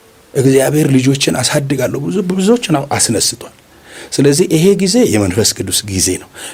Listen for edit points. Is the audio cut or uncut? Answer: uncut